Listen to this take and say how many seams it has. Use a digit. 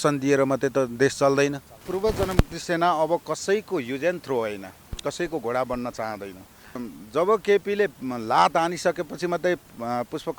2